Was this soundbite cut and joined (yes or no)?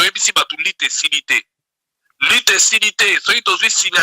no